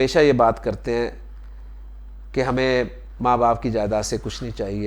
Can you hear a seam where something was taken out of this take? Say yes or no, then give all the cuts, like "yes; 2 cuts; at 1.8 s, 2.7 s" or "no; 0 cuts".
no; 0 cuts